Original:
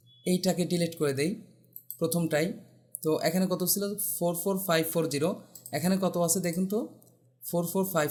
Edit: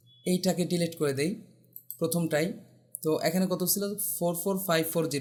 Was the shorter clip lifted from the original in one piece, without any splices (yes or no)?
yes